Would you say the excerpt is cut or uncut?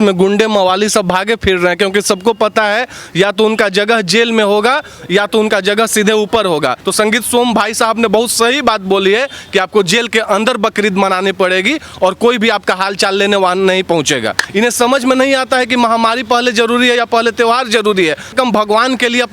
cut